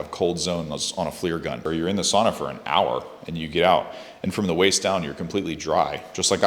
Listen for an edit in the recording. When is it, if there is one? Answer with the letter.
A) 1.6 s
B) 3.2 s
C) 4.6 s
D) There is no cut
A